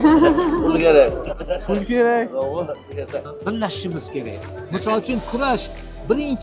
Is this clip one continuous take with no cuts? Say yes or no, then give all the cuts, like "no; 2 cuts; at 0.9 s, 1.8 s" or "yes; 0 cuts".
no; 1 cut; at 3.3 s